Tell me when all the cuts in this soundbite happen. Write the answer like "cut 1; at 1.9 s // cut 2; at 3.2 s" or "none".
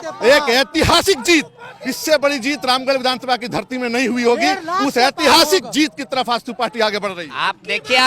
none